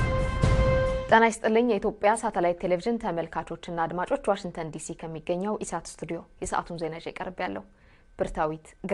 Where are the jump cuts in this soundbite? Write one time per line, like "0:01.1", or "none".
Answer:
0:01.0